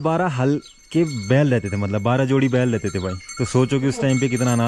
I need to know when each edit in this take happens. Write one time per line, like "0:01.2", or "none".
none